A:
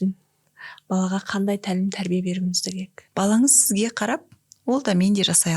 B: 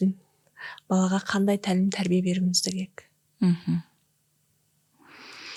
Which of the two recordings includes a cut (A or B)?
A